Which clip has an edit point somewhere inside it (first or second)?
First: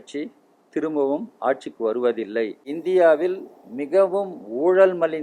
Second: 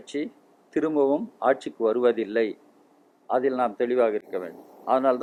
first